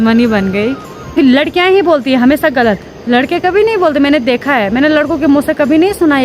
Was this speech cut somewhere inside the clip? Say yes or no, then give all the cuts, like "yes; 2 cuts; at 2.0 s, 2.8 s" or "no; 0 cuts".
yes; 1 cut; at 1.1 s